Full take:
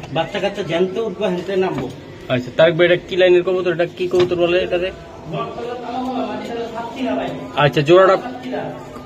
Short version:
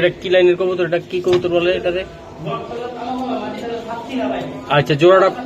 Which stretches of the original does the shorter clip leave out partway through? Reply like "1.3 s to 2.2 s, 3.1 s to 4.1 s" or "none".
none